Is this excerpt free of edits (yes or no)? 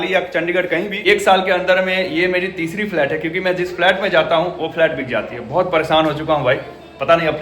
no